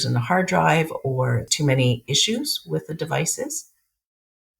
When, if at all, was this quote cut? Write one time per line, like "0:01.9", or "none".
0:01.5